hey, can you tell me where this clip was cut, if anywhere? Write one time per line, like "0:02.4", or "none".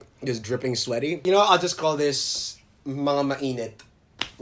0:01.2

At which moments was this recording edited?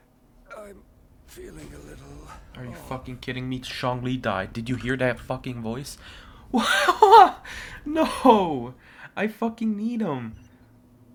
none

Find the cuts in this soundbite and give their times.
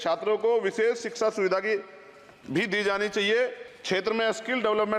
0:03.7

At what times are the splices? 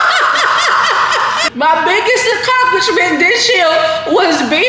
0:01.4

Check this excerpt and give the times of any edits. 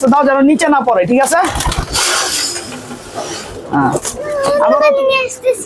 0:04.4

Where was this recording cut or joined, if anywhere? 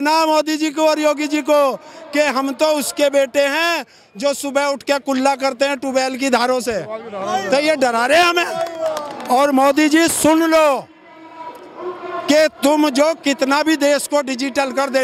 0:09.1

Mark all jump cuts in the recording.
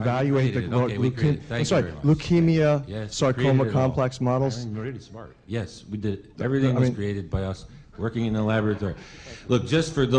none

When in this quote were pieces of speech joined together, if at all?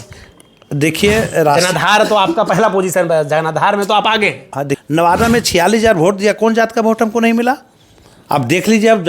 0:04.8

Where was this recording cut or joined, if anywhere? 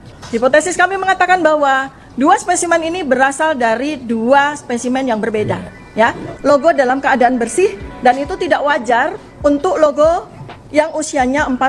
0:06.2

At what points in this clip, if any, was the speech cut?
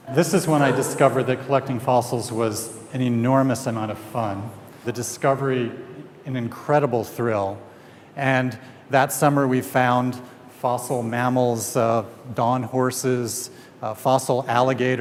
none

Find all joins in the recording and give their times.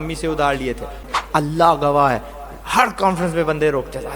0:01.2

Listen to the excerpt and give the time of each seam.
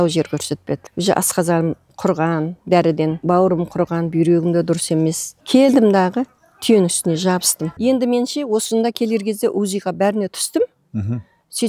0:00.9
0:03.2
0:05.3
0:07.7

